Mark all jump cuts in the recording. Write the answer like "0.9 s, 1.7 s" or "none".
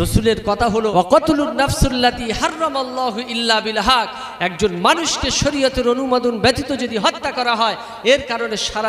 0.9 s